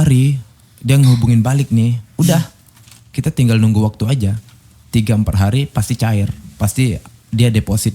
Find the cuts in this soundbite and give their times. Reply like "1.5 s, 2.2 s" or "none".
none